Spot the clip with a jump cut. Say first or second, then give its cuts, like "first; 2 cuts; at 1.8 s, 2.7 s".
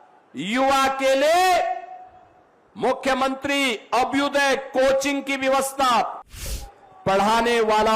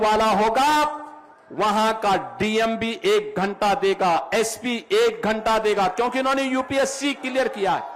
first; 1 cut; at 6.4 s